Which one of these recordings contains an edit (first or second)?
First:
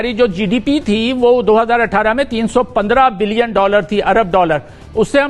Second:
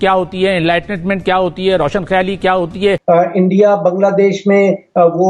second